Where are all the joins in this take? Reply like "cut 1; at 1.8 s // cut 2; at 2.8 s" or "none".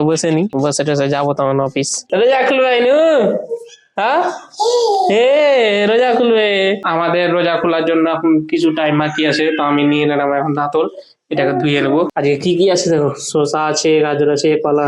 cut 1; at 2.1 s // cut 2; at 6.8 s // cut 3; at 12.1 s